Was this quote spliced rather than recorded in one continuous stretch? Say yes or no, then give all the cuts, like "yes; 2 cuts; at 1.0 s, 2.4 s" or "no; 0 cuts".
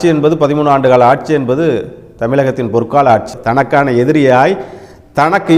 yes; 1 cut; at 3.3 s